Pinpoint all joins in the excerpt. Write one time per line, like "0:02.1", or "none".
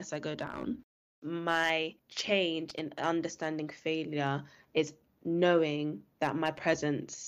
0:01.1
0:02.1

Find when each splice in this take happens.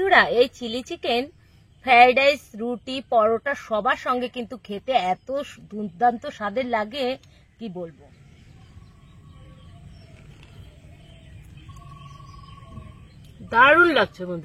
0:07.9
0:13.3

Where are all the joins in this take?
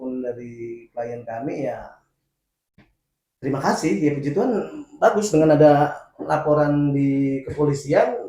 none

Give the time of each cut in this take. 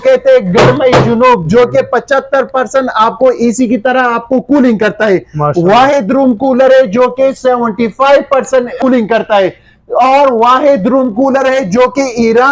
none

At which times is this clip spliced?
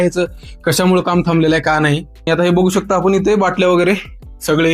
0:02.3

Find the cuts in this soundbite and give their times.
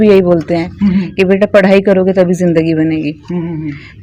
none

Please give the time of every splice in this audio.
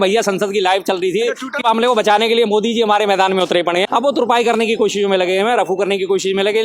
0:01.6
0:03.9

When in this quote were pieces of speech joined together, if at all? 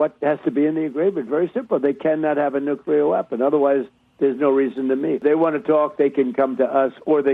0:05.2

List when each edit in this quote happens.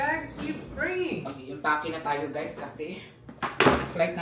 none

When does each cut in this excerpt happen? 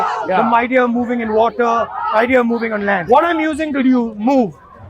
0:03.0

